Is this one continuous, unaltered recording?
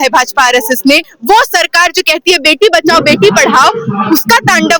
no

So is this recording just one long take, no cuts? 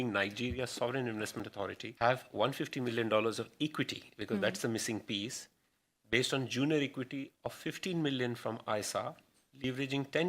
no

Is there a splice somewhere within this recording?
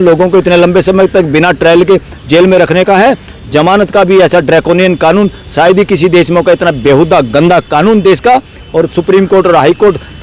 no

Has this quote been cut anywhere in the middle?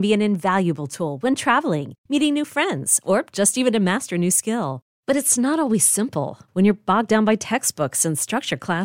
no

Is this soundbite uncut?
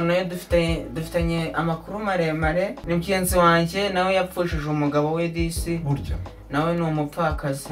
no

